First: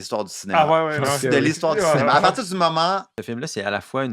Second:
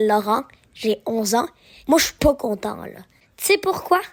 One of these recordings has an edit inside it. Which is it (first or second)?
first